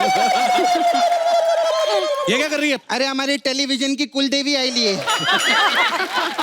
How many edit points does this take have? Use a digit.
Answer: 1